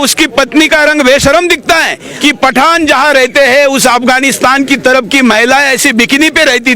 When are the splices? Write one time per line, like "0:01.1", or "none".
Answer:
0:02.0